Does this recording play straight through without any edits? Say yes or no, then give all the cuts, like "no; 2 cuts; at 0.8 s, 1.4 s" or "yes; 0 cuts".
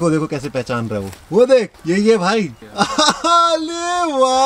no; 2 cuts; at 1.7 s, 2.6 s